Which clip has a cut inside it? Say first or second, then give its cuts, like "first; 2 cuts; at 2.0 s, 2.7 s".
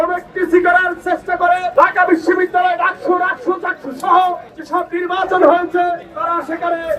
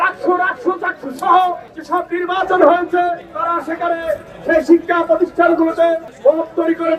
first; 1 cut; at 1.7 s